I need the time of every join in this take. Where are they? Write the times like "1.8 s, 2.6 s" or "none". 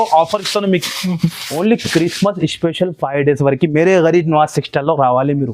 1.4 s